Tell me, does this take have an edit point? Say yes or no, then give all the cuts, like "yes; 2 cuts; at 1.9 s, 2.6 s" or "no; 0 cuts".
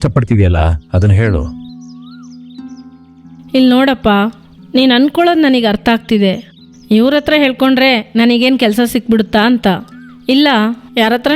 no; 0 cuts